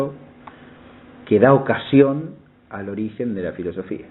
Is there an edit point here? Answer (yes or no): yes